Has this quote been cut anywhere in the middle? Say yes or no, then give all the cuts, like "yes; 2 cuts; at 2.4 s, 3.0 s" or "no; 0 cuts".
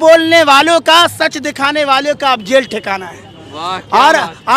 no; 0 cuts